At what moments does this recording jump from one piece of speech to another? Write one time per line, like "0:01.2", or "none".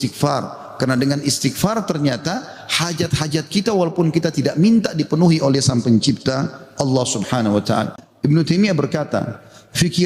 0:08.3